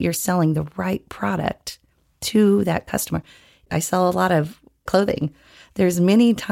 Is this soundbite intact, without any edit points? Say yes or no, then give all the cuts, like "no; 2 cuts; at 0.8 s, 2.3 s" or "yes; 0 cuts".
no; 1 cut; at 3.7 s